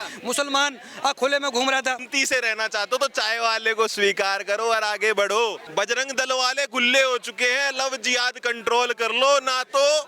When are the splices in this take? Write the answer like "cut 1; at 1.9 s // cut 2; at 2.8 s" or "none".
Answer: cut 1; at 2.1 s // cut 2; at 5.6 s